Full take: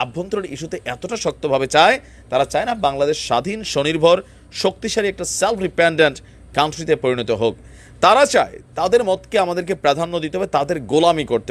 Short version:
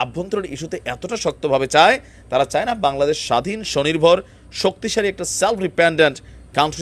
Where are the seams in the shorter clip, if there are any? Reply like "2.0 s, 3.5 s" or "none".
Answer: none